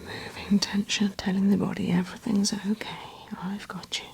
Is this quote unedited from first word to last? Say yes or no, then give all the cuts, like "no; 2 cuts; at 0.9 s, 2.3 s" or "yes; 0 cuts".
no; 1 cut; at 1.2 s